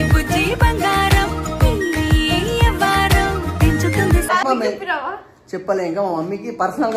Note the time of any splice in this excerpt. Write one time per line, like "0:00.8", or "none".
0:04.4